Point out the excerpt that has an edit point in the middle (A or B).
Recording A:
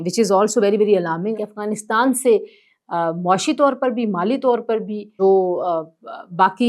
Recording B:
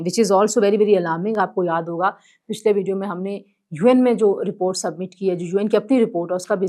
A